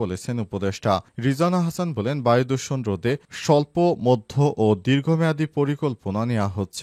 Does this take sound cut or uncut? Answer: uncut